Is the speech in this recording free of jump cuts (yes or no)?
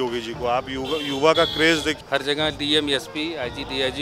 no